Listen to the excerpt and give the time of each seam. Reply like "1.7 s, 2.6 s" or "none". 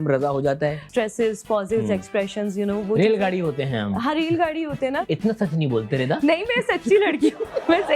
0.8 s, 5.0 s

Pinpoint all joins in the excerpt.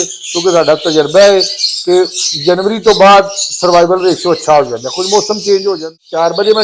5.7 s

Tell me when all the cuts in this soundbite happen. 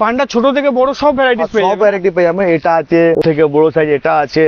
none

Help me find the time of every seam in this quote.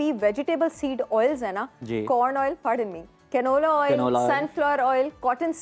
none

